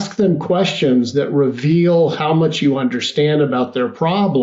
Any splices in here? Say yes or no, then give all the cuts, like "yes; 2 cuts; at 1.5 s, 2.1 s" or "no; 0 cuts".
no; 0 cuts